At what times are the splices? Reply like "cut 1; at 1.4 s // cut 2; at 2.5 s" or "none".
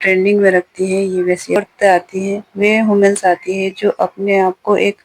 cut 1; at 1.6 s